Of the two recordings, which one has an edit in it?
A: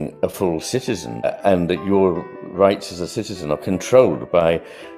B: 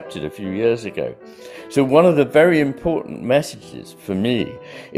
A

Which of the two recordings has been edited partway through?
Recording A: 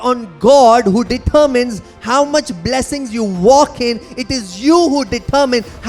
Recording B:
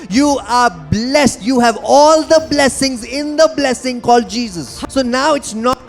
B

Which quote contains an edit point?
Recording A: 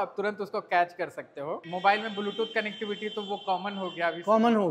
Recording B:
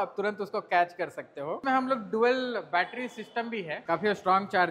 B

